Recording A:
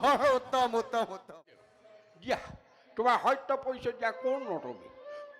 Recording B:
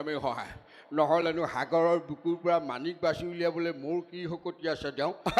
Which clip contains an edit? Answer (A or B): A